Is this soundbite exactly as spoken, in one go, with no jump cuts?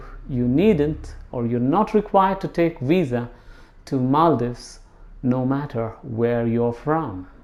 yes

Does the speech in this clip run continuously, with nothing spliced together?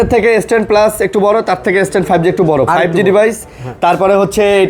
yes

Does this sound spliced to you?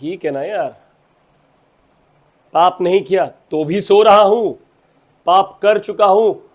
no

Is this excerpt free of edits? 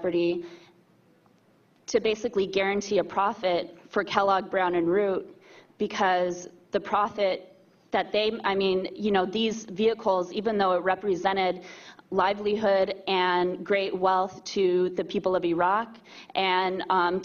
yes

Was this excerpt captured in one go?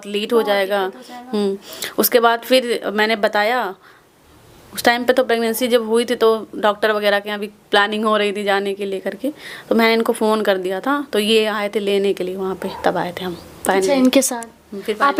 yes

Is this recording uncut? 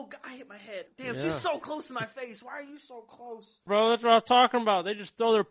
no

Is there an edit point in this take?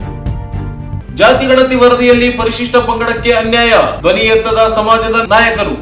yes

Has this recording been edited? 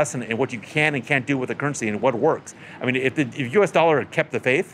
no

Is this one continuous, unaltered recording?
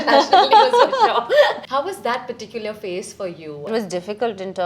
no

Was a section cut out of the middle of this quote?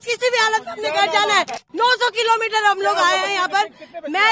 yes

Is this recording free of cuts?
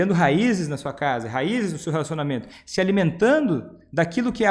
yes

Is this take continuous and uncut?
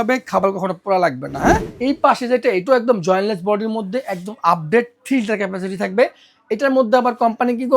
no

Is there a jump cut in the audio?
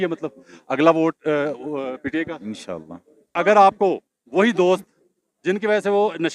yes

